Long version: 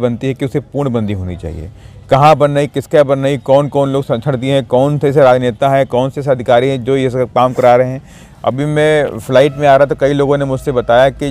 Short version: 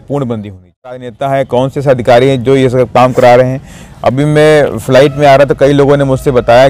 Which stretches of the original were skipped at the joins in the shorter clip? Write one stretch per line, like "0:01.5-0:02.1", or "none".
0:01.8-0:05.6